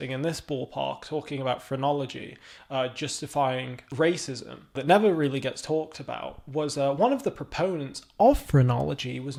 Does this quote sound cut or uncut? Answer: uncut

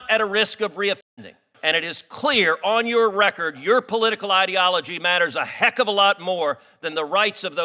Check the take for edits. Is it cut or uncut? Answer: cut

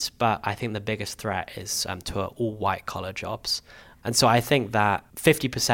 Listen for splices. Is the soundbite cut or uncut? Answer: cut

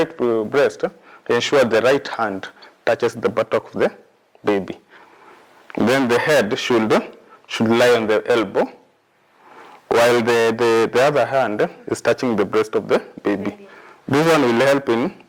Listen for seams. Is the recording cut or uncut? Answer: uncut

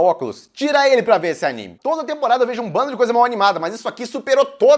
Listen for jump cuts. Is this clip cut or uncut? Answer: cut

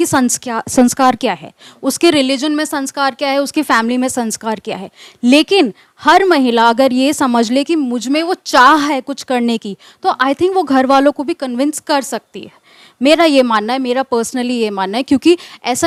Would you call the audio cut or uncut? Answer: uncut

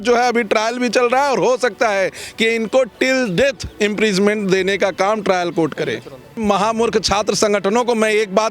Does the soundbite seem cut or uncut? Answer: cut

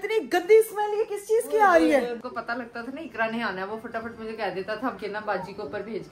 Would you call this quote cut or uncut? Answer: cut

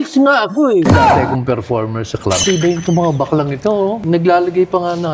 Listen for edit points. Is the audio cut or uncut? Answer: cut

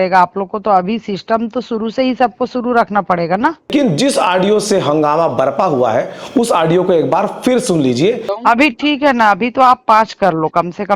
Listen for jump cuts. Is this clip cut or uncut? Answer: cut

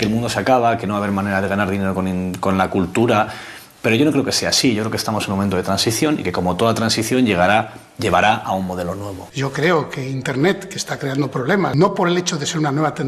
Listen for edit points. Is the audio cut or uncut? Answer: cut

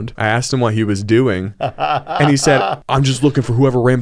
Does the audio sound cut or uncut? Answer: cut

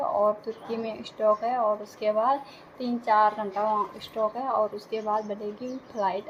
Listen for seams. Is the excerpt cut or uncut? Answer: uncut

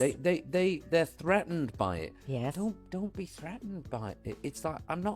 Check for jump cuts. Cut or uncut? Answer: uncut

